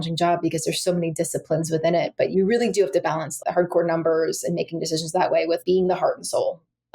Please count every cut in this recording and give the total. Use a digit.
3